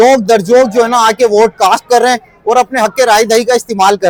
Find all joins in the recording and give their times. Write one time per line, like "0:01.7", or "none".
none